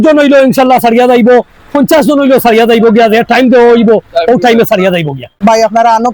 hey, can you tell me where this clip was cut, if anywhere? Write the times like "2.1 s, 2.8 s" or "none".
5.2 s

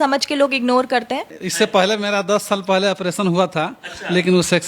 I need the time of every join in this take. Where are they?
1.4 s

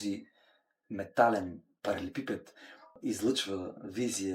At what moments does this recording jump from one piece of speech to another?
1.7 s, 3.0 s

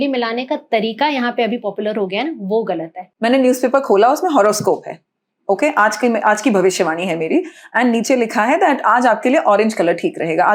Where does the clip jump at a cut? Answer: 3.0 s

